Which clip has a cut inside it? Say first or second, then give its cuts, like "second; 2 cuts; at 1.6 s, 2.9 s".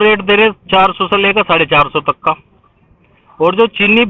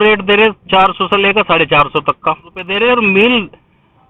second; 1 cut; at 2.6 s